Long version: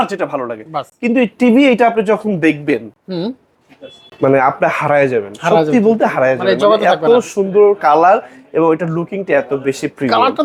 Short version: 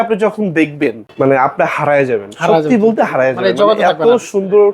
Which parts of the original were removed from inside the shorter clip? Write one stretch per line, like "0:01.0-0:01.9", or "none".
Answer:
0:02.9-0:04.1

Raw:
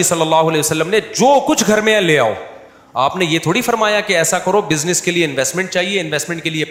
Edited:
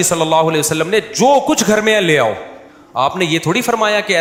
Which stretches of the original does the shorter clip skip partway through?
none

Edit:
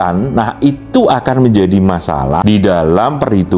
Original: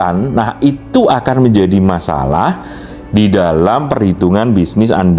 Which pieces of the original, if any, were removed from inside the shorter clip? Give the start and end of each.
0:02.4-0:03.1

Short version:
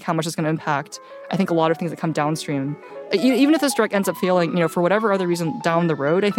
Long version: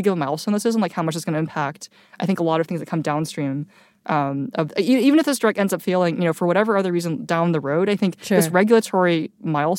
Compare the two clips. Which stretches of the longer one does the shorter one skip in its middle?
0:03.9-0:04.7

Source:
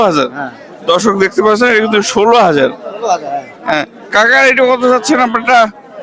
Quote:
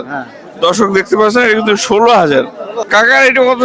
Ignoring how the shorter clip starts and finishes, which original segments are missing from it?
0:03.0-0:03.9

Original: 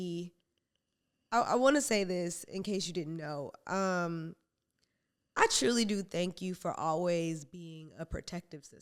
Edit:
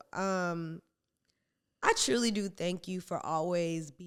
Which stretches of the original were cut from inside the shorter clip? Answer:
none

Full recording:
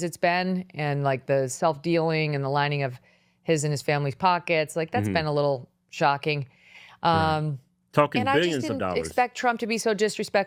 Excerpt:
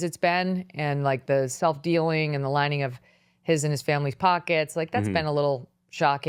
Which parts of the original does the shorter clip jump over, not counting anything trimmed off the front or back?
none

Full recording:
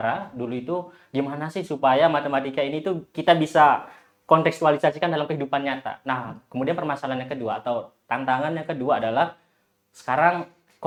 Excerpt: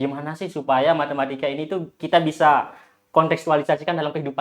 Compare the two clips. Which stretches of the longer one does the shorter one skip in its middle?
none

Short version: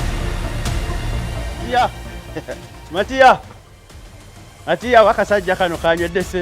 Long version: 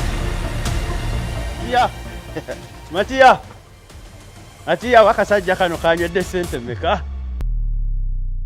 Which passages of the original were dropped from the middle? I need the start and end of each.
none

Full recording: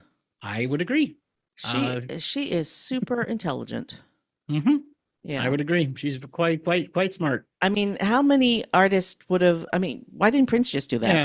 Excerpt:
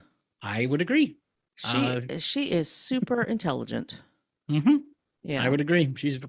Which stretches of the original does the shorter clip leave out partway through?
none

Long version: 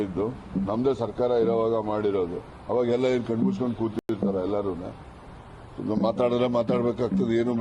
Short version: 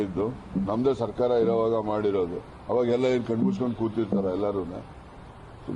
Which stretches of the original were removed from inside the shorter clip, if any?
0:03.9-0:04.1

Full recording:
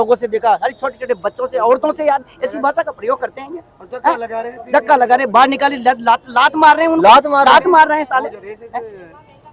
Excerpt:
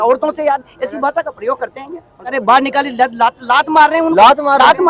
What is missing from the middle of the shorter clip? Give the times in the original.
0:04.0-0:05.2

